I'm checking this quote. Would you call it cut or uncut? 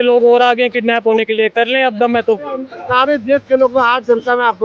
cut